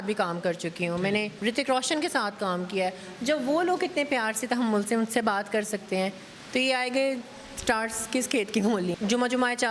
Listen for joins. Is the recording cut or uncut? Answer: cut